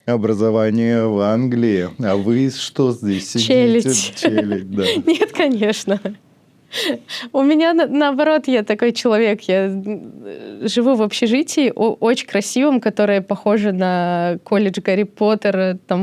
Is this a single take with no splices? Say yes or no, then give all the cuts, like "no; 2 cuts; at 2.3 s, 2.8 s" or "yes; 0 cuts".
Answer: yes; 0 cuts